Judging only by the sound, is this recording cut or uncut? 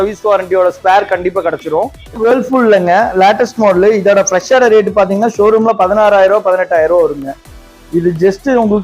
cut